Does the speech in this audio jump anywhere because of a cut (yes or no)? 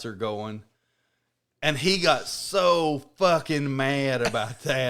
no